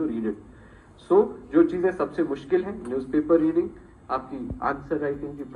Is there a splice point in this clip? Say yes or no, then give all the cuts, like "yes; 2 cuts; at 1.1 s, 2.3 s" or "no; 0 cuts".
no; 0 cuts